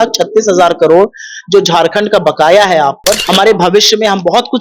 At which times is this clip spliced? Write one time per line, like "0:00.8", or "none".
0:03.2